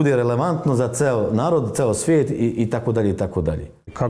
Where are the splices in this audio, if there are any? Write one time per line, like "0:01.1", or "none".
none

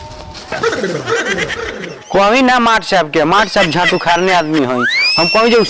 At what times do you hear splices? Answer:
0:02.0

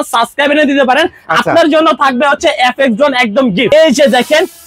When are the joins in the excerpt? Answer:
0:03.7

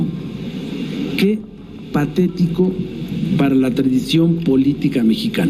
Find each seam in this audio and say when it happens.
none

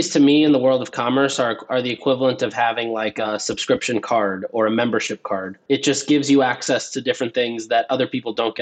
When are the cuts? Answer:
0:03.2
0:05.6

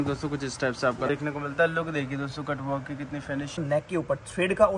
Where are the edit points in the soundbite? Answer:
0:01.1
0:03.6

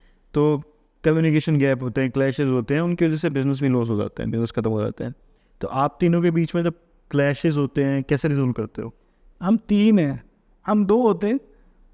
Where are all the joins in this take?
none

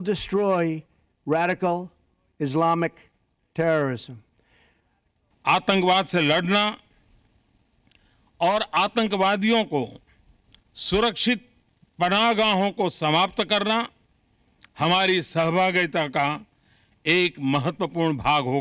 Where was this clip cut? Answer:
0:05.3

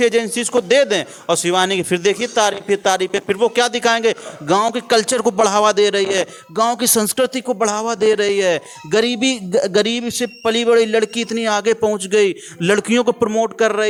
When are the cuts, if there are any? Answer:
none

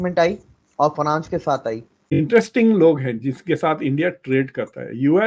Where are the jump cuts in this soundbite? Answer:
0:02.2

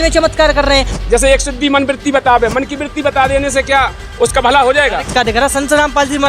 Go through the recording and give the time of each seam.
0:00.9
0:05.1

